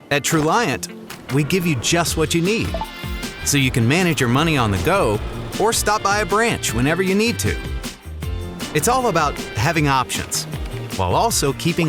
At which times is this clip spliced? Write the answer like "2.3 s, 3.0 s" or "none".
none

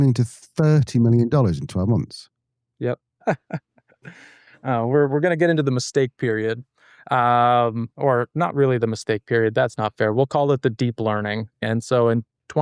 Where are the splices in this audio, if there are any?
3.2 s, 11.6 s

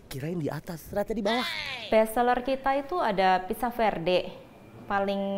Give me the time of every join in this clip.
1.6 s

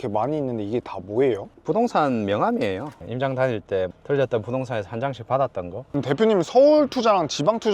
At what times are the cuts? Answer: 2.9 s, 5.8 s

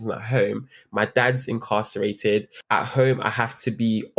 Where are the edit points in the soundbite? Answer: 2.5 s

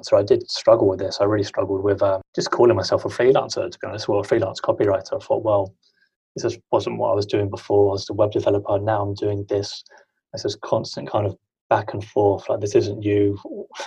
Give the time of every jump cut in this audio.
2.3 s

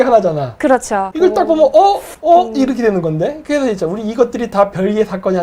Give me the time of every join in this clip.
1.1 s, 2.1 s

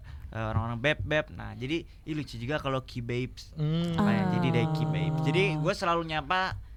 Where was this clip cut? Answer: none

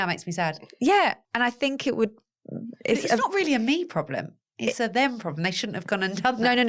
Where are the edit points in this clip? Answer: 1.2 s

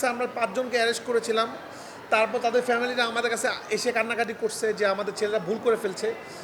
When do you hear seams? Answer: none

